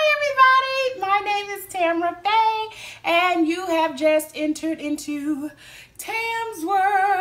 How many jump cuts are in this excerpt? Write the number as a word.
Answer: zero